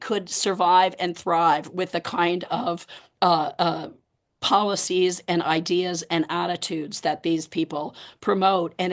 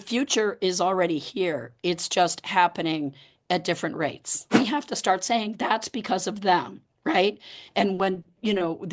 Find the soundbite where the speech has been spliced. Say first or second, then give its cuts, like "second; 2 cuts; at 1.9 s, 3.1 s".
second; 1 cut; at 4.6 s